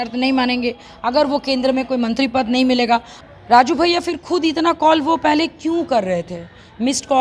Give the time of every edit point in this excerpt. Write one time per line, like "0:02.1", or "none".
0:03.1